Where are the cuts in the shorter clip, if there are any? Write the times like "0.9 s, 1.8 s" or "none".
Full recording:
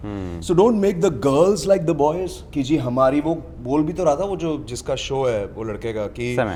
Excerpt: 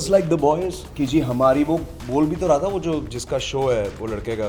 none